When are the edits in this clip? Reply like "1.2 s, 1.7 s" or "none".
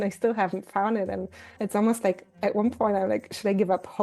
1.6 s